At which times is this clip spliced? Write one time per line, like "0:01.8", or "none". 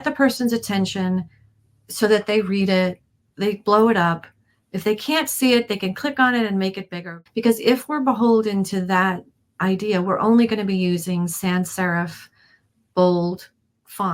0:07.1